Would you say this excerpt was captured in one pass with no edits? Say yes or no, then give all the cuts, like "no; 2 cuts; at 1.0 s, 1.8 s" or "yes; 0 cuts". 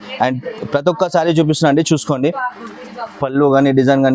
yes; 0 cuts